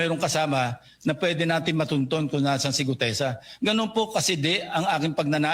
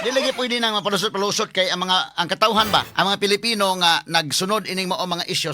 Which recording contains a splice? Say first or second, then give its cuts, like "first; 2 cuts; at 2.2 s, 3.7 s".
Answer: second; 1 cut; at 2.9 s